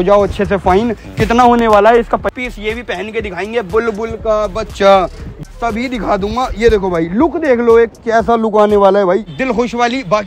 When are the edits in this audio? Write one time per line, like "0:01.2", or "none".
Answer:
0:02.3
0:05.3
0:09.3